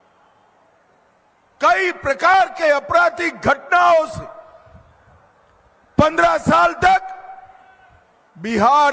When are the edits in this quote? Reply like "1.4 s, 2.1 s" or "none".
3.6 s